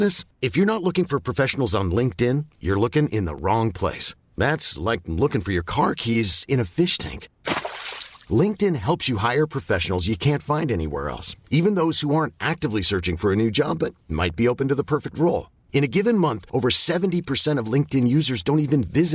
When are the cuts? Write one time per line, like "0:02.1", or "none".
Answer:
none